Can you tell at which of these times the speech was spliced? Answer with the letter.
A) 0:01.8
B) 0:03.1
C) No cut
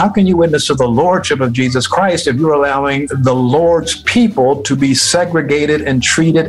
B